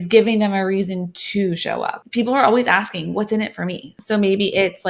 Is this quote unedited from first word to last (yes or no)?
no